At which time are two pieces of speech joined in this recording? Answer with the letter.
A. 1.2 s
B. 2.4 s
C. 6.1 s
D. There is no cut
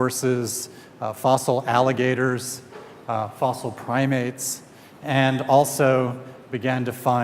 C